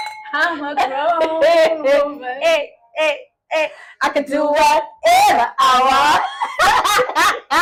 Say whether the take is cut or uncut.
uncut